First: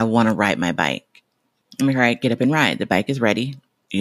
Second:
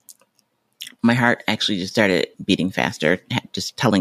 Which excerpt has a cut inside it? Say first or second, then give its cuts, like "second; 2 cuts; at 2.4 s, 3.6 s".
second; 1 cut; at 2.3 s